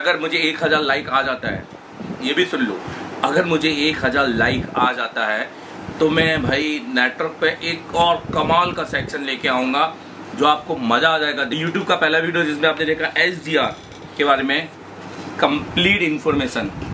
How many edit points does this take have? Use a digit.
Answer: 1